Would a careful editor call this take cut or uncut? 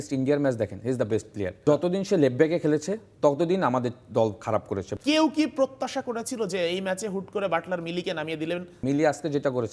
cut